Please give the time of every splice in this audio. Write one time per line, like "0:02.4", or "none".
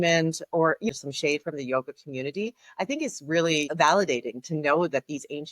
0:00.9
0:03.7